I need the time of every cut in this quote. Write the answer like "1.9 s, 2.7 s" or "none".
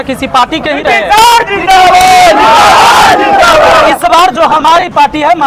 none